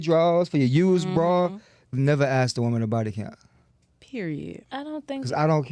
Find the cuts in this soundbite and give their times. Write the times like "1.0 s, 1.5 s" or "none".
1.9 s